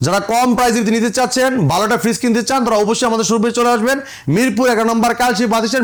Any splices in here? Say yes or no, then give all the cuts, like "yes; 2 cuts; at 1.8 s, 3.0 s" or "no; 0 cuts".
no; 0 cuts